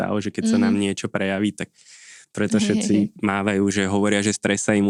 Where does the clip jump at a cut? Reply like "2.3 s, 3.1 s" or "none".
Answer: none